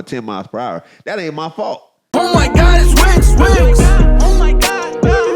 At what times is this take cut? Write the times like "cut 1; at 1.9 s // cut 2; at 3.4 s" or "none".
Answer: cut 1; at 2.0 s